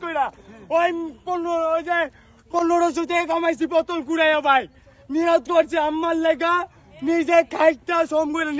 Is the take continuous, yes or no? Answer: yes